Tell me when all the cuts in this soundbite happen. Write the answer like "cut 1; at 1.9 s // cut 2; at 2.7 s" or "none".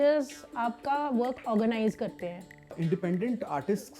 cut 1; at 2.8 s